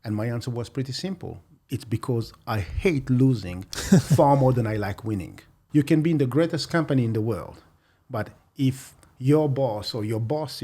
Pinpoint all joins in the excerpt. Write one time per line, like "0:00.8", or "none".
0:05.6

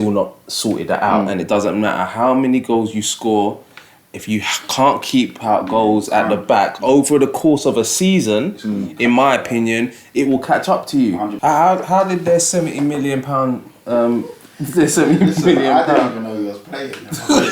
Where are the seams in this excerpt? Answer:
0:11.3

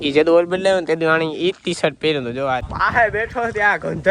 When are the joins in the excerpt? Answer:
0:02.7

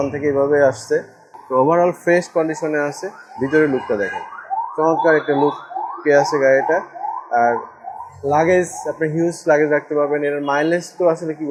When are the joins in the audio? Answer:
none

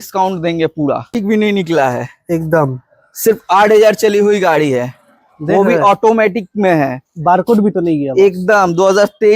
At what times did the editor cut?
0:01.1

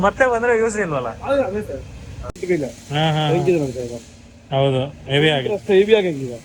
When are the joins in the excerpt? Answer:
none

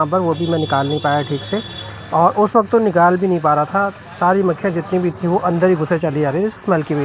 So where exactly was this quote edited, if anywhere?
none

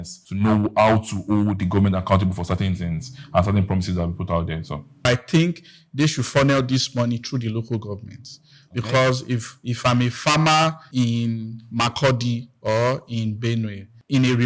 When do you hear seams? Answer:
0:05.1
0:10.8

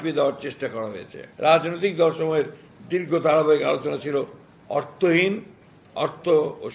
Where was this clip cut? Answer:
0:01.2

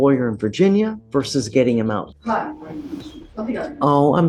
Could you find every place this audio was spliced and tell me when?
0:01.0
0:02.1
0:03.2

